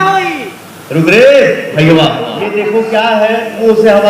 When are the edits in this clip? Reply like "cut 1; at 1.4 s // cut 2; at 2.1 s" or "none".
cut 1; at 2.5 s